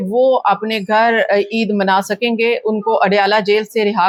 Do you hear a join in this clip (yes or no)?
no